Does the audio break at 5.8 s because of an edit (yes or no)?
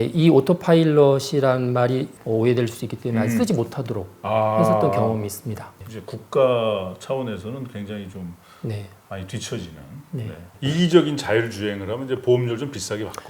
yes